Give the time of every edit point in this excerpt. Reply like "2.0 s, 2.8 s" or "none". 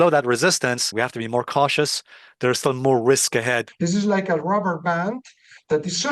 0.9 s, 3.7 s